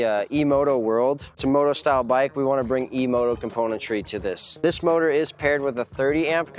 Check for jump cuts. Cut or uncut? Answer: cut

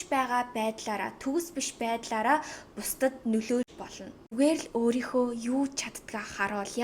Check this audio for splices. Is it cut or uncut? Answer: cut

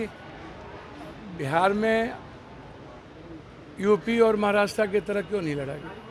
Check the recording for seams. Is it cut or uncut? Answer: uncut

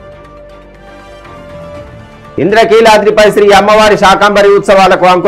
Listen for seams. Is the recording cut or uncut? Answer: cut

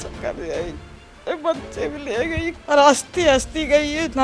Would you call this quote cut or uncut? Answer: cut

